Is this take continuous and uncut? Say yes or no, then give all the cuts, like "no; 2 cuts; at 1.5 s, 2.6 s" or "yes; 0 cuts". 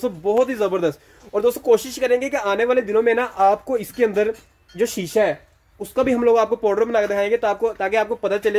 yes; 0 cuts